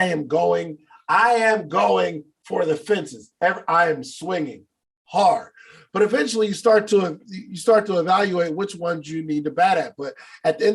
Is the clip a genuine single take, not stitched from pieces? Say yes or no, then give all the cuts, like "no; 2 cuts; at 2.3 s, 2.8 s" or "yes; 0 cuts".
yes; 0 cuts